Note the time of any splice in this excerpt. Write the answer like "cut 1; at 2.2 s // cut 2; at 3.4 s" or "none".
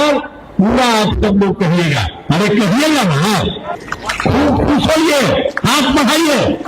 cut 1; at 3.7 s